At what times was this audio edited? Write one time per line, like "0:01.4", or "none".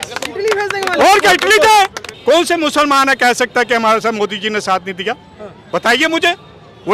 0:02.1